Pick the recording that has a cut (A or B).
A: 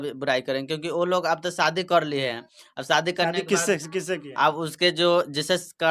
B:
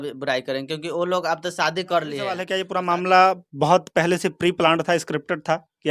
B